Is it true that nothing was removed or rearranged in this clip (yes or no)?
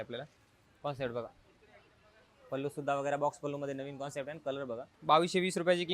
no